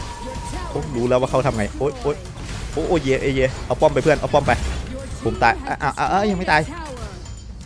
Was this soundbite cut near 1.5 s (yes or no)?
no